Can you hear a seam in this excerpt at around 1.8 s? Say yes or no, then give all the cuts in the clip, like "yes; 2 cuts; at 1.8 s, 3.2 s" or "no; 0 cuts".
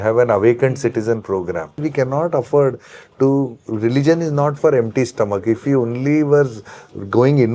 yes; 1 cut; at 1.8 s